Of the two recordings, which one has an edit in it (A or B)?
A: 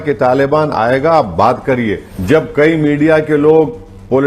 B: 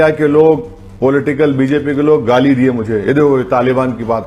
A